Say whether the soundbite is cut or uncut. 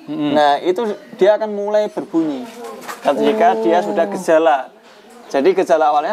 uncut